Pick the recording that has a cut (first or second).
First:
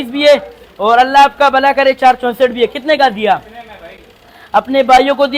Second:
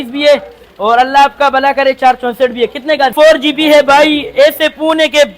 second